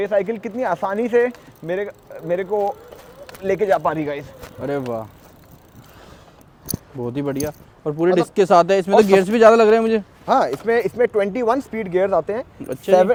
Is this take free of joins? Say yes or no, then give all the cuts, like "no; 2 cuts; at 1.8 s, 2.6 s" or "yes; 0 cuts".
yes; 0 cuts